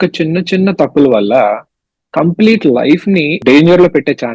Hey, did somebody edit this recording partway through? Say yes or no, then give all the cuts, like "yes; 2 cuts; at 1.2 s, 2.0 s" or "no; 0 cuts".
yes; 1 cut; at 3.4 s